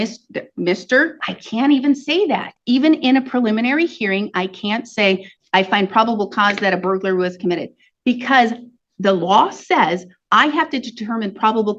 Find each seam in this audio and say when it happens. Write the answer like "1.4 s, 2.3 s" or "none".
1.2 s